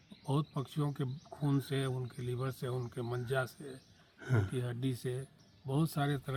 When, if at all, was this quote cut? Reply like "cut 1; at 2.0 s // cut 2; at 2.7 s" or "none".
none